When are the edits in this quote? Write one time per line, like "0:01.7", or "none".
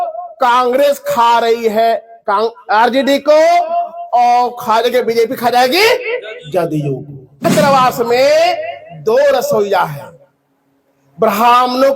0:07.4